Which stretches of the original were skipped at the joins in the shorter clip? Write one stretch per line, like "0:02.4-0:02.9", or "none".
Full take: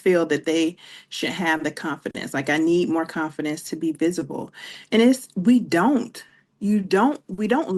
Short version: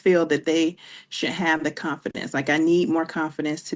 none